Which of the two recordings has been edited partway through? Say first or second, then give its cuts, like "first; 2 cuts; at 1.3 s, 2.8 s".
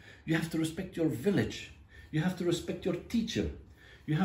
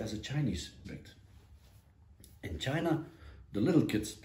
second; 1 cut; at 1.0 s